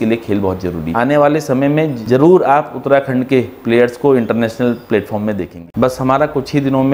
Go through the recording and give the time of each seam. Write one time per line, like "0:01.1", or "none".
0:00.9
0:02.0
0:05.5